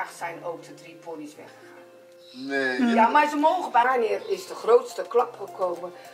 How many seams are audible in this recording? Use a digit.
1